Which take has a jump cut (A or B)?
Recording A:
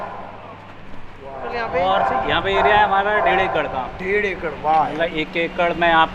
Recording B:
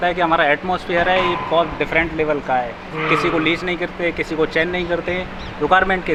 A